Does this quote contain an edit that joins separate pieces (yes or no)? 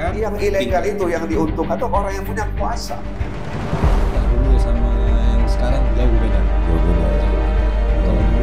no